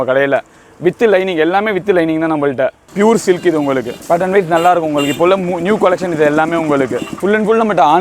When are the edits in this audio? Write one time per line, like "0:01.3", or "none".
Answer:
0:02.8
0:07.1